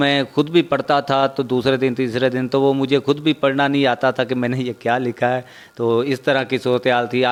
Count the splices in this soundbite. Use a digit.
0